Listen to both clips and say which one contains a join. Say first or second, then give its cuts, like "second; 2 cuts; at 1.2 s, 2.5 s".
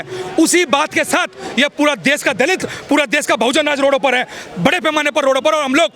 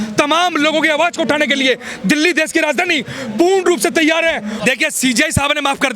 second; 1 cut; at 4.6 s